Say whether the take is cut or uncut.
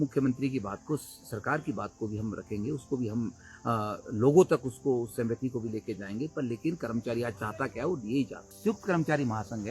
cut